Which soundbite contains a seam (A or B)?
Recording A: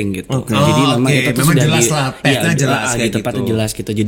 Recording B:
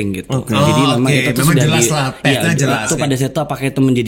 B